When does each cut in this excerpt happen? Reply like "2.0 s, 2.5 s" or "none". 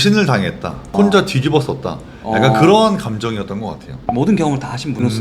3.9 s

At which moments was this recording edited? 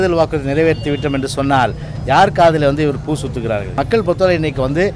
3.7 s

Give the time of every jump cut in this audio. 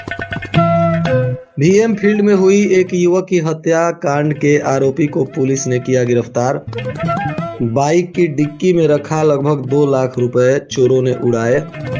1.4 s

